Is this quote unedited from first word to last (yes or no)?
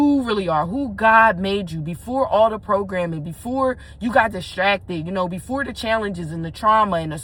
yes